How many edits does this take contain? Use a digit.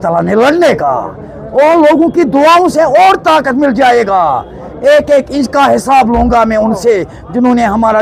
0